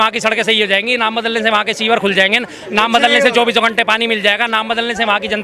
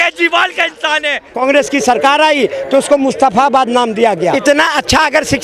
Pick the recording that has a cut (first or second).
second